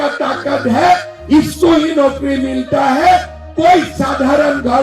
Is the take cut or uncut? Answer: uncut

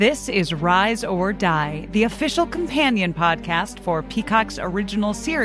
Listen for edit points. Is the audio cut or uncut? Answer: uncut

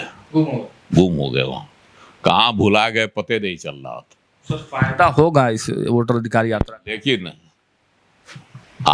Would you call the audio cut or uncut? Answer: uncut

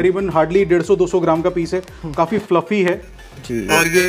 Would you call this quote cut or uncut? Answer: uncut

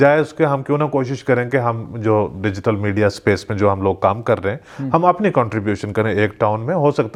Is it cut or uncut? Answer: uncut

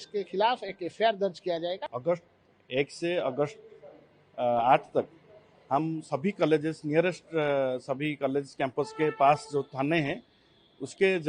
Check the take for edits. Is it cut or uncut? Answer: cut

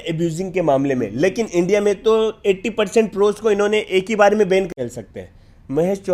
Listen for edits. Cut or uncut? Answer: cut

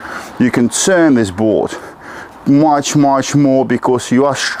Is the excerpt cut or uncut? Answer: uncut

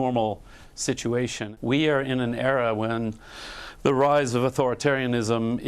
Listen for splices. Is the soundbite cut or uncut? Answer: cut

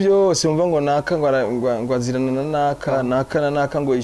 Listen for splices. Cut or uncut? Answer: uncut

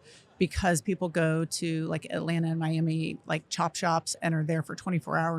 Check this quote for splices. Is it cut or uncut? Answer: uncut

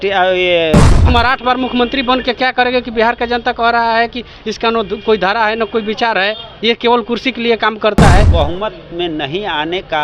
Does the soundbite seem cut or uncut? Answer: cut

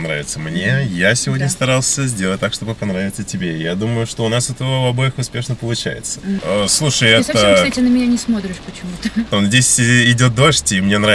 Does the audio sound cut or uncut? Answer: cut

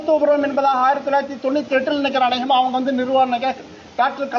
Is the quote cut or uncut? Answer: uncut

